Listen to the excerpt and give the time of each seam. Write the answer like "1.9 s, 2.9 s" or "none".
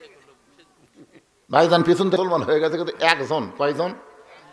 2.2 s